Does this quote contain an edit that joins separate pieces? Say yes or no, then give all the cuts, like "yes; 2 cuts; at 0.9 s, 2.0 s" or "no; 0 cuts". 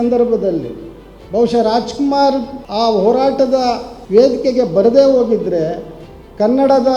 yes; 2 cuts; at 2.6 s, 3.9 s